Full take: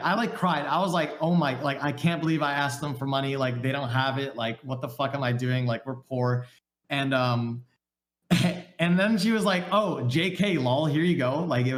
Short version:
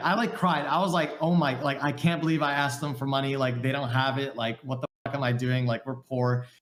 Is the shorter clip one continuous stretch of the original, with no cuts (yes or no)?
yes